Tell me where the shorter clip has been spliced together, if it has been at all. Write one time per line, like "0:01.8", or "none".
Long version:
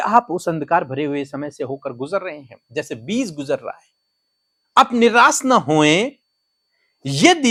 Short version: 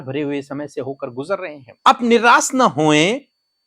0:01.6